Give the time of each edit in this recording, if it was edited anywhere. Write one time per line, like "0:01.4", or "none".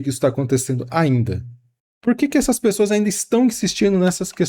0:01.9

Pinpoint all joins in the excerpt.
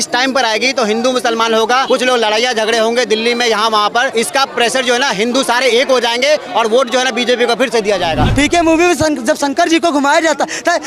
0:01.8
0:04.1
0:08.3

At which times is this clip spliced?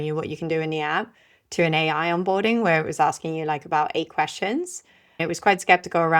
0:05.2

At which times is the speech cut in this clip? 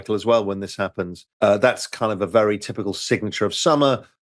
0:01.2

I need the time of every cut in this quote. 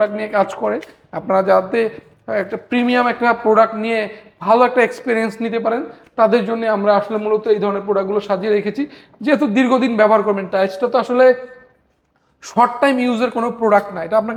none

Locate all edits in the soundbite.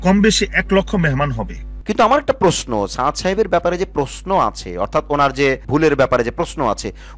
0:01.8
0:05.6

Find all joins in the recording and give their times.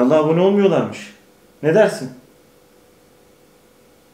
none

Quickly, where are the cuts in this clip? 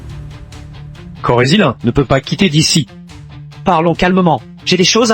0:01.2

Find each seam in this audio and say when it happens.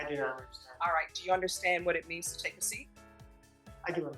none

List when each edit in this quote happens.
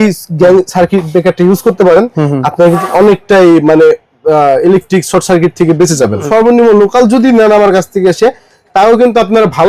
0:06.2

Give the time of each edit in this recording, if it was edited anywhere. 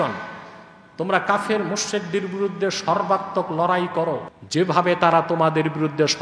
0:04.3

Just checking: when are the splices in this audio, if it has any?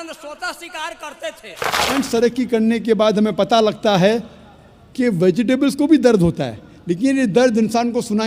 0:01.9

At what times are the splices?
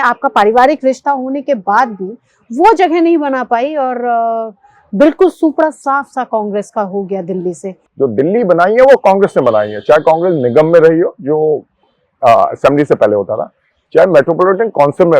0:07.8

